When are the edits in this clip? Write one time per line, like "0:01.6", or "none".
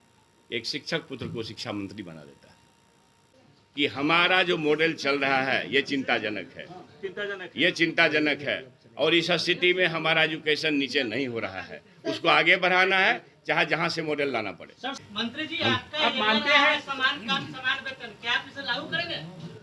0:03.2
0:14.9

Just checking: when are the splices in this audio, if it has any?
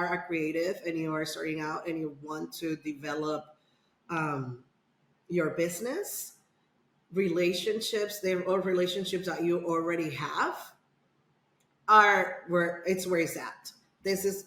none

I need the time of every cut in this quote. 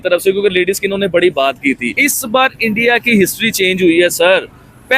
0:01.9

